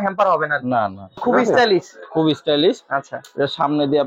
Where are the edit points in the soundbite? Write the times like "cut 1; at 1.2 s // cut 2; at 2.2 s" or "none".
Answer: cut 1; at 1.2 s